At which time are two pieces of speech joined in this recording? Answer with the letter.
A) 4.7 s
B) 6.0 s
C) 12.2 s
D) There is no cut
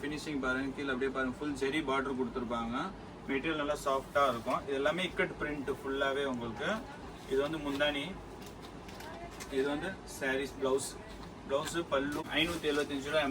C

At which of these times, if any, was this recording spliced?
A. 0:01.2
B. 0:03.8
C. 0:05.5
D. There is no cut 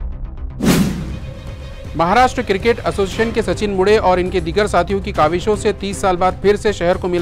A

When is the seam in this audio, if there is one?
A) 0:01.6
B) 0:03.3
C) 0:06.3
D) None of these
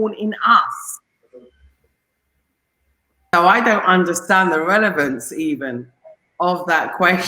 B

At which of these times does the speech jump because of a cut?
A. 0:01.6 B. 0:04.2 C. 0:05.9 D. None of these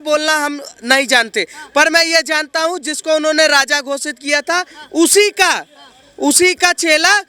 D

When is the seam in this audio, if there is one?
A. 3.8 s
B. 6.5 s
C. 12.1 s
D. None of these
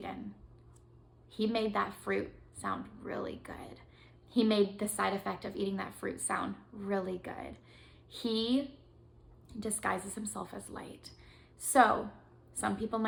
D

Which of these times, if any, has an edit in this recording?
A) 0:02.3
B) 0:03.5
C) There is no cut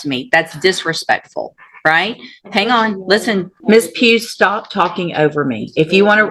B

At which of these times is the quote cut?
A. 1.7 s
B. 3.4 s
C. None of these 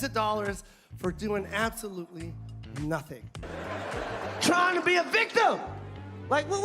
B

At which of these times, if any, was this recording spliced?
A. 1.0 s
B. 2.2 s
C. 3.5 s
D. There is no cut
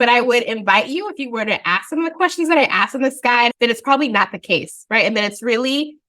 C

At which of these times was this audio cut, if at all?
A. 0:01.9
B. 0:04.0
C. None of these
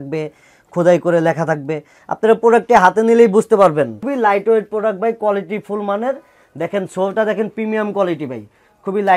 B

